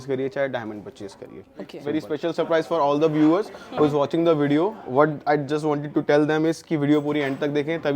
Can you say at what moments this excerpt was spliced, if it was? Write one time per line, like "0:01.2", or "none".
0:01.9